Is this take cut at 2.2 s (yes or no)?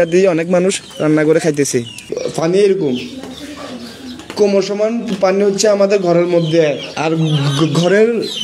yes